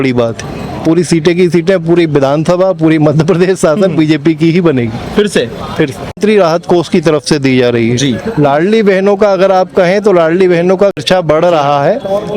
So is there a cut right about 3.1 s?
no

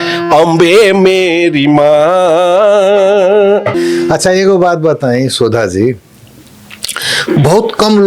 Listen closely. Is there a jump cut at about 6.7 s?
no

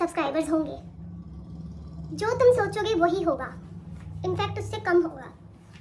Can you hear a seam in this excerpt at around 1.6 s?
no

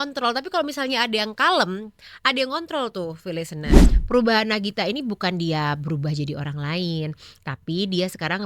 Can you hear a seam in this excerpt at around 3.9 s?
yes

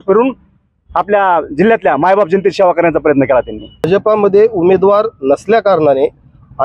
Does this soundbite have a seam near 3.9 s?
yes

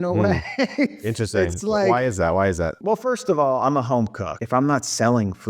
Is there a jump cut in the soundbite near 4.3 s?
yes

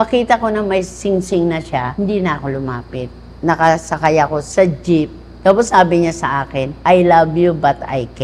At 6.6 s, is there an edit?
yes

